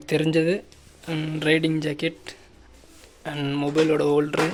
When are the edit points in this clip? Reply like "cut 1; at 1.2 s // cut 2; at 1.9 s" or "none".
none

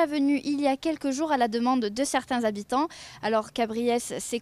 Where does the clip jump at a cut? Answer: none

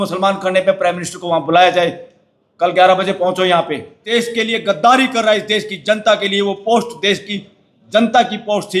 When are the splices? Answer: cut 1; at 3.9 s

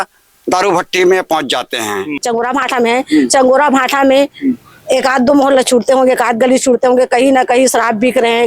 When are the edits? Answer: cut 1; at 2.1 s

